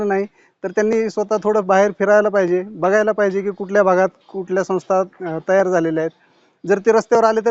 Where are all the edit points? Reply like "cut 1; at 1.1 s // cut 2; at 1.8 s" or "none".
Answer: none